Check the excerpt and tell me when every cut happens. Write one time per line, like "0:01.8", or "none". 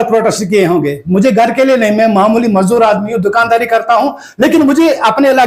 none